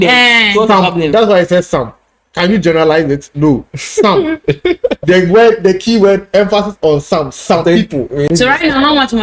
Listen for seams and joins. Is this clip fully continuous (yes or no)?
no